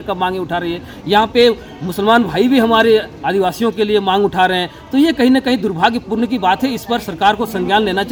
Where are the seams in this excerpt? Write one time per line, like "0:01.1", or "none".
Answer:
none

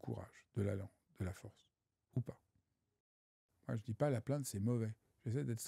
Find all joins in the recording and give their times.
0:03.3

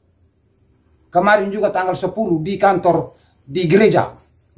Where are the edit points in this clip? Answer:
none

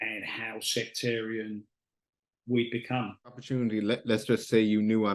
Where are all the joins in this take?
0:03.5

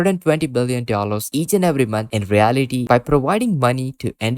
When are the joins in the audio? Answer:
0:02.8

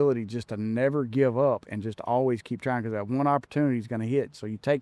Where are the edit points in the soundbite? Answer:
none

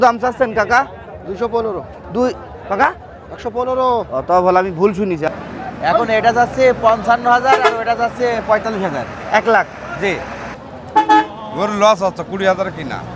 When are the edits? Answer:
0:05.3
0:10.6

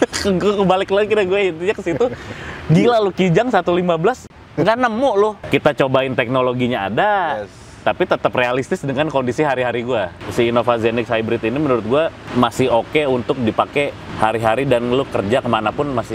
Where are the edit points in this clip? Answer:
0:05.4
0:10.2
0:12.2
0:14.0

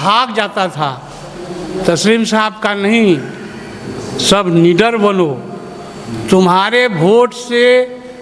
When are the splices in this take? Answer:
none

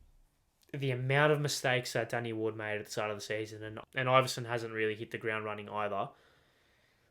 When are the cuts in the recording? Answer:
0:03.7

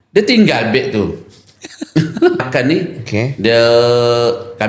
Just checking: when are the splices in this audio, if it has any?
0:02.4

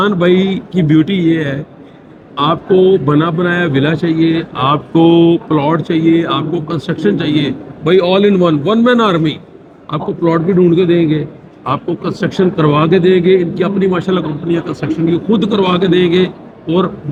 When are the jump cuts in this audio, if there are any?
none

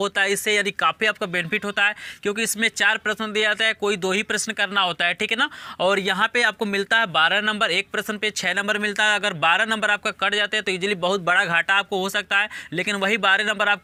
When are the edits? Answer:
none

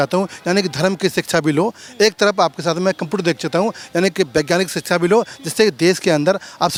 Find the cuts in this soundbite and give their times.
none

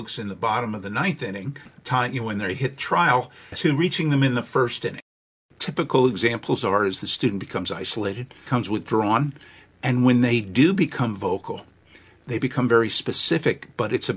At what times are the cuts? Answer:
0:01.6
0:03.5
0:05.2
0:08.3
0:12.2

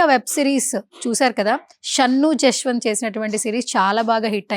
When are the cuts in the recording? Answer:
0:01.8

